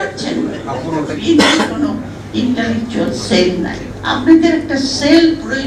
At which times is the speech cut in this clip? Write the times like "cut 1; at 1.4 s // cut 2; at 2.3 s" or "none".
cut 1; at 1.2 s // cut 2; at 3.9 s